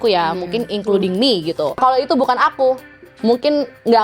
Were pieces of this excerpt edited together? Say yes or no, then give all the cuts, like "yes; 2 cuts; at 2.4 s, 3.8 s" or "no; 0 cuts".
yes; 1 cut; at 1.8 s